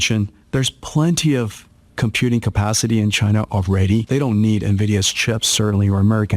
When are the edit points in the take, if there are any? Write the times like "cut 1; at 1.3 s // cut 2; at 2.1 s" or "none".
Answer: cut 1; at 4.1 s